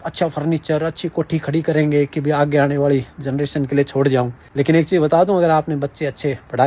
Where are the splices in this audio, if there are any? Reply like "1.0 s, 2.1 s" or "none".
4.4 s

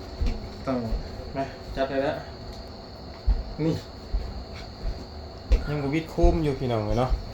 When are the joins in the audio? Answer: 2.7 s

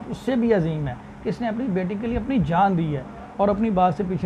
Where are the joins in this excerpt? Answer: none

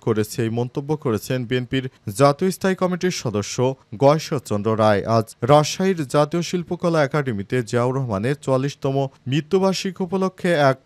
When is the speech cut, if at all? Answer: none

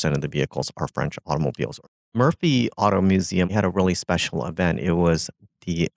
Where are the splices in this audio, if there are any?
1.9 s, 3.5 s

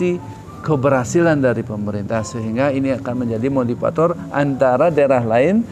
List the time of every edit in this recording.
none

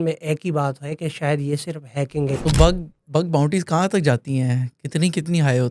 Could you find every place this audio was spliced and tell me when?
2.4 s

